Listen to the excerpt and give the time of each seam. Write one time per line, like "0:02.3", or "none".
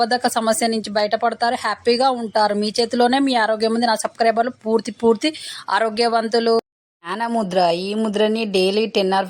0:06.8